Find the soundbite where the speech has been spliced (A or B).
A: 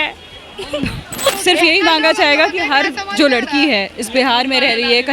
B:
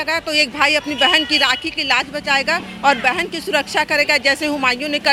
A